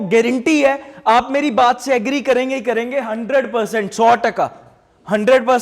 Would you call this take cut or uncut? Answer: uncut